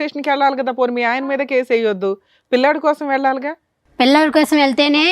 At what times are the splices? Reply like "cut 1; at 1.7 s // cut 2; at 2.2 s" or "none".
none